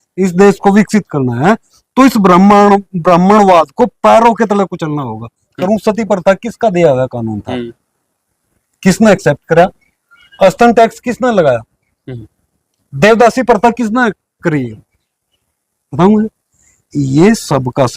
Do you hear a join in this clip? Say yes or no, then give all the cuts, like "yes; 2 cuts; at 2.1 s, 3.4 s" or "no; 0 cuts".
yes; 1 cut; at 5.6 s